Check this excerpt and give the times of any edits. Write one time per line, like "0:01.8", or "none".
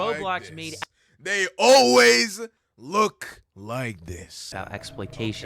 0:04.5